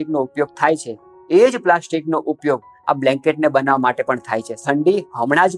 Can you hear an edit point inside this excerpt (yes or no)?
yes